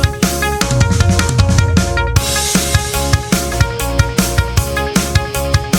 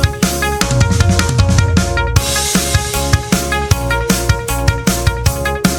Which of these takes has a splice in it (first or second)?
first